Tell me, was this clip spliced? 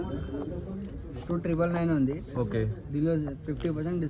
no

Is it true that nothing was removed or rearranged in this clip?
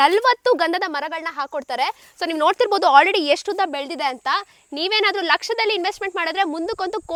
yes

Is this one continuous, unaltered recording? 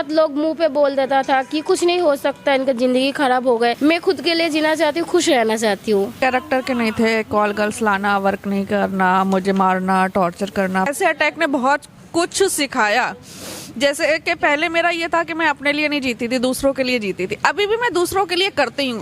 no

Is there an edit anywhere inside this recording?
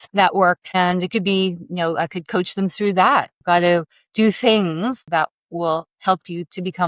yes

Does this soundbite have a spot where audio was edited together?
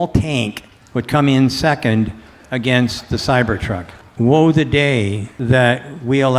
yes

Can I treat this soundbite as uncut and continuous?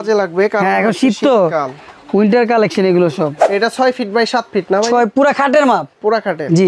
no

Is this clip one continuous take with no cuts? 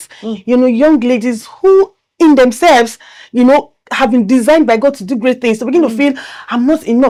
yes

